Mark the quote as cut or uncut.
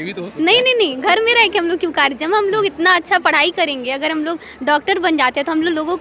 uncut